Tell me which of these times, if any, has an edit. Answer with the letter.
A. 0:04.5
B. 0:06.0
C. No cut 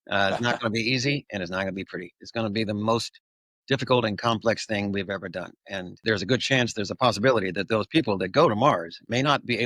B